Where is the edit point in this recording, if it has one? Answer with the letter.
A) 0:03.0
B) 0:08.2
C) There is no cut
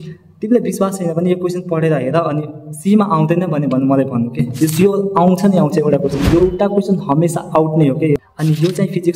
B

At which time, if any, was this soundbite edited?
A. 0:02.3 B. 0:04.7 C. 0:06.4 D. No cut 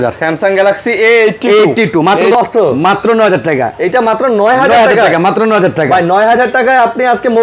A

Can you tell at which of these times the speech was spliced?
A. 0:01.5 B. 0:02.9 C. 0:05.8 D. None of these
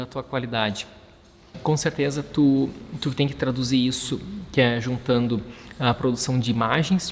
A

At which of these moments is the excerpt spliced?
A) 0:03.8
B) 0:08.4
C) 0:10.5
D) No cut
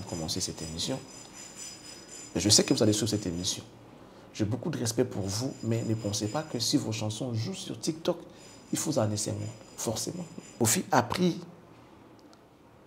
C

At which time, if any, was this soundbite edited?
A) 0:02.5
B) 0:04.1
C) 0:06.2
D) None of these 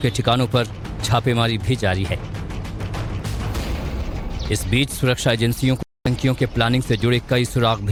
D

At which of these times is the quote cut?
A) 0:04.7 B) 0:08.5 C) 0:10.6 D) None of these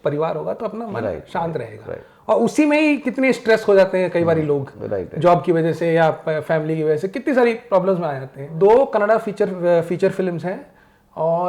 B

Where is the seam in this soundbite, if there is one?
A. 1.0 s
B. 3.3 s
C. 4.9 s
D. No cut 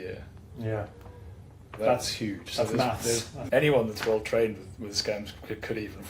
B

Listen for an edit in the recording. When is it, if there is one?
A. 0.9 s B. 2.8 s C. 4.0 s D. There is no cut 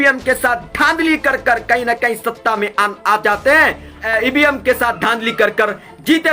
C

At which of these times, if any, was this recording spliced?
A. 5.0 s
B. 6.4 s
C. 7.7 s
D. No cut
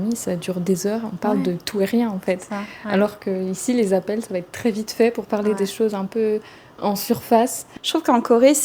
C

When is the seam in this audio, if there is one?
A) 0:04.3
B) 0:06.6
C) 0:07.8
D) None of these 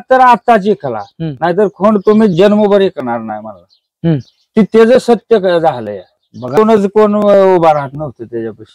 B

